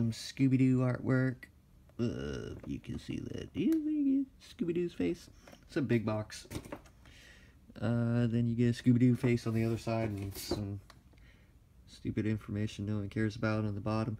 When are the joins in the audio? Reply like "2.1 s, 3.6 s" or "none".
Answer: none

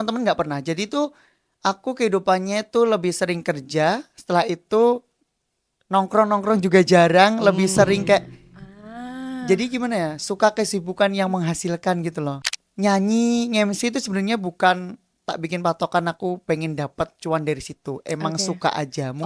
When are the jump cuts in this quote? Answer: 12.3 s

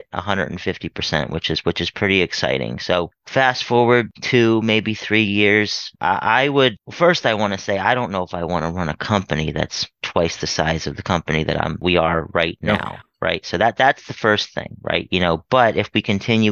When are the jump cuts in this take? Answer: 5.9 s, 6.8 s, 11.8 s

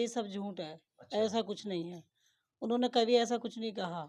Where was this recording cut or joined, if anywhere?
none

